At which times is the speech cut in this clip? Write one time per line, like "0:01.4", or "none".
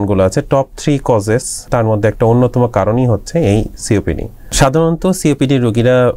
0:01.7
0:04.4

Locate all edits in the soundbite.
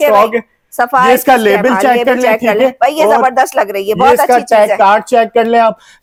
none

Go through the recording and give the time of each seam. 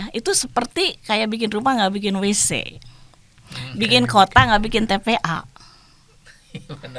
none

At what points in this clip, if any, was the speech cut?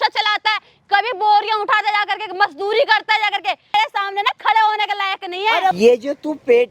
0:03.7
0:05.8

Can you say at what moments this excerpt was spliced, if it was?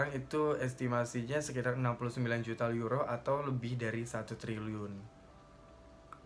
none

